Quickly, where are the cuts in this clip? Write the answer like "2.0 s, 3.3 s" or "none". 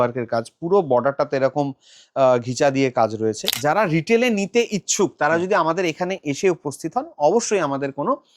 3.5 s

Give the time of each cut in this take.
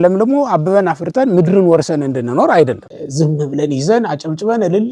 2.8 s

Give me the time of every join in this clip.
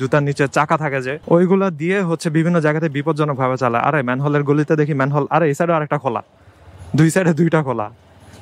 1.1 s

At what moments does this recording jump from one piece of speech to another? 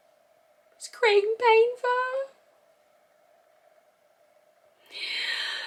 none

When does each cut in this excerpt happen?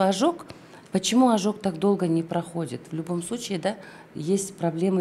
none

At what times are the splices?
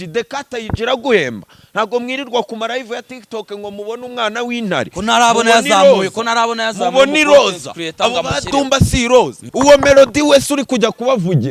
9.4 s

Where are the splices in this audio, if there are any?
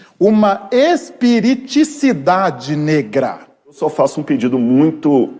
3.8 s

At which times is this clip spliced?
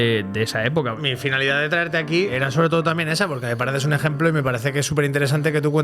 1.0 s, 2.3 s

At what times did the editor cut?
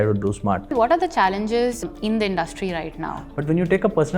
0.7 s, 1.8 s, 3.3 s

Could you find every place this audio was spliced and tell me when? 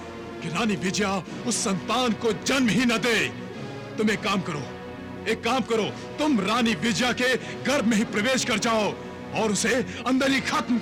none

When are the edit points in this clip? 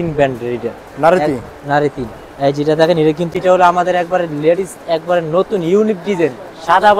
3.3 s

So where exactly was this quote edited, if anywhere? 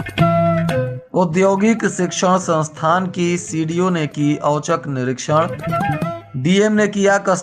1.0 s

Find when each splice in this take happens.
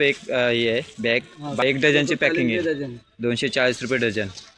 1.6 s

